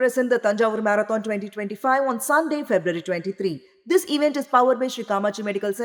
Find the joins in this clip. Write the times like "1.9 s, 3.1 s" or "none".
none